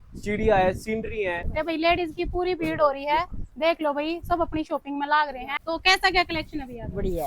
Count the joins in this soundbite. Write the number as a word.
two